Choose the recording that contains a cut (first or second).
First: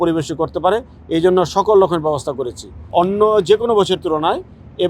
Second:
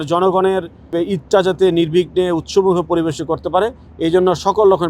first